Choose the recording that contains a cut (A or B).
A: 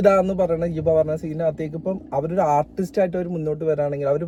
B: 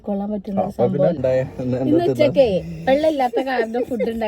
B